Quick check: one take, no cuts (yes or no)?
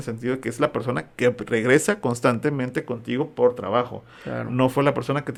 yes